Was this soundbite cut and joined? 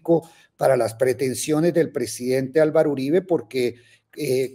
no; 0 cuts

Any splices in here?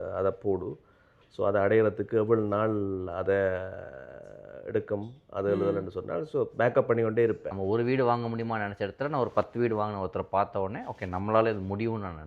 yes; 1 cut; at 7.5 s

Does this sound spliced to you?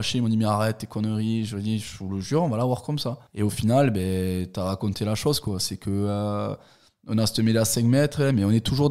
no; 0 cuts

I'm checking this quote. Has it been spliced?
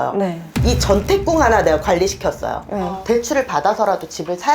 yes; 1 cut; at 3.0 s

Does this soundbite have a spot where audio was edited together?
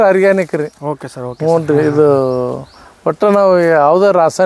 no; 0 cuts

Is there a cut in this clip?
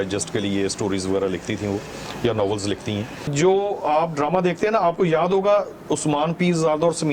yes; 1 cut; at 3.3 s

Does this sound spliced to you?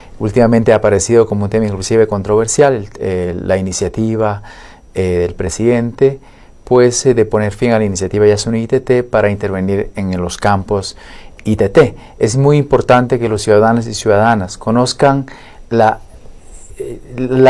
no; 0 cuts

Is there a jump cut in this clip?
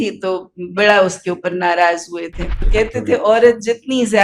yes; 1 cut; at 2.6 s

